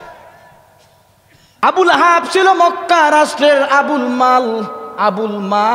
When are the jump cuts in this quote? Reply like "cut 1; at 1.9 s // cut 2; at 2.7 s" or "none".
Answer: cut 1; at 1.4 s